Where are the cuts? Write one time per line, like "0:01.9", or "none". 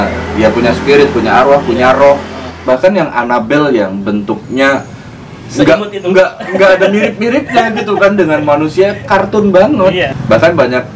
0:02.5
0:10.0